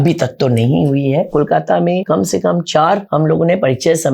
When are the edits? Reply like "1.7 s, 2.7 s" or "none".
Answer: 1.3 s, 2.0 s, 3.0 s